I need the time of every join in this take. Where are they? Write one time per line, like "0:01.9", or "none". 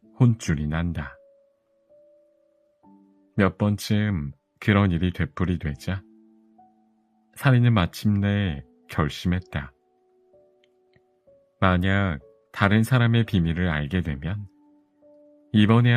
none